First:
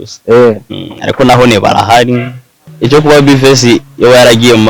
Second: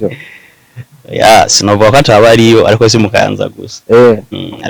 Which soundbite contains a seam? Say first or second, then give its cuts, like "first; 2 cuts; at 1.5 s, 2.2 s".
first; 1 cut; at 2.7 s